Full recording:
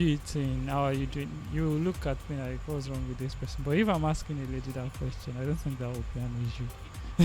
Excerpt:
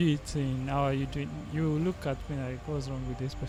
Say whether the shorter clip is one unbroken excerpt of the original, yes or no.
yes